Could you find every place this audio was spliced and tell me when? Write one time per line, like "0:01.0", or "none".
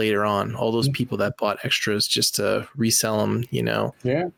none